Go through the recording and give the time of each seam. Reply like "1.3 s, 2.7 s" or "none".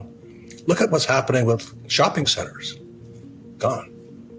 none